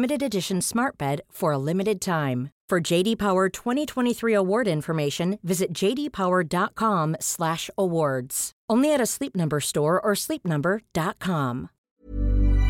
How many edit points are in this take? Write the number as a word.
one